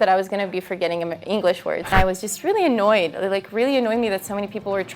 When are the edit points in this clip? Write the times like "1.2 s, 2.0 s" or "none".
1.9 s